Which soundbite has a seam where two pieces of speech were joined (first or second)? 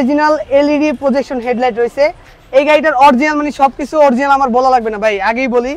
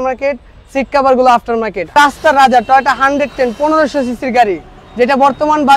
second